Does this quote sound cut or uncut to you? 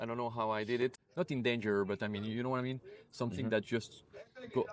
cut